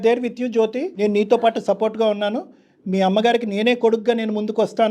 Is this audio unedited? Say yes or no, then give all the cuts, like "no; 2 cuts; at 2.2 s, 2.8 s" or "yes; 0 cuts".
no; 1 cut; at 0.9 s